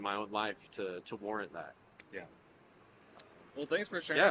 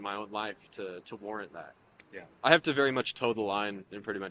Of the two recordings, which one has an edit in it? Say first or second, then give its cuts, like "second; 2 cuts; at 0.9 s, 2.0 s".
second; 1 cut; at 2.3 s